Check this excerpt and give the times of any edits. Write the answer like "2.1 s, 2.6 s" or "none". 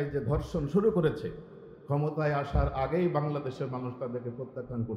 none